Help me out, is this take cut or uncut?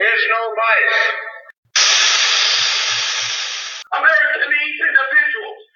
cut